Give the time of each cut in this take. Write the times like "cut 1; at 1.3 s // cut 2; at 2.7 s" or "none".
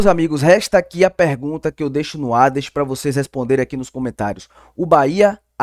none